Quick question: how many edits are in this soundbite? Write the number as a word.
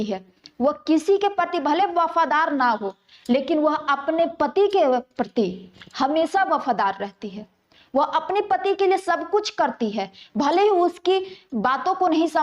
zero